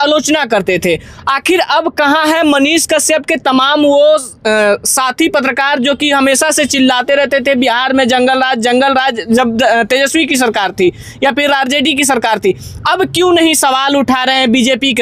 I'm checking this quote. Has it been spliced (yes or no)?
no